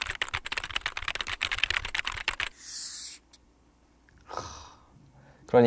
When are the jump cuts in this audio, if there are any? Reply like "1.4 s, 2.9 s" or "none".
1.8 s